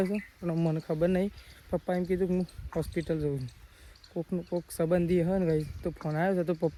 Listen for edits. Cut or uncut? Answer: uncut